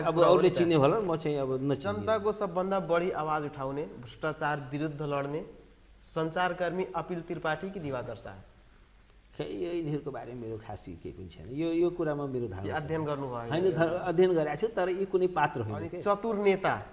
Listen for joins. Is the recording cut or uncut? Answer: cut